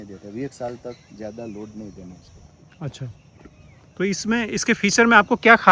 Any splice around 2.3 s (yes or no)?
no